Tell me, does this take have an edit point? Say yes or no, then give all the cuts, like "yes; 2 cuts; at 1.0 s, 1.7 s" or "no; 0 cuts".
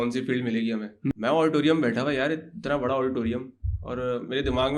yes; 1 cut; at 1.1 s